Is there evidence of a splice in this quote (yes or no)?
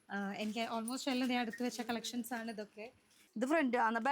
yes